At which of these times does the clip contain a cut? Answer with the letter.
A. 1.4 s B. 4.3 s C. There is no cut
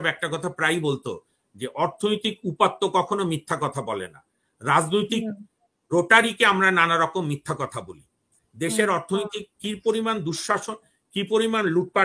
C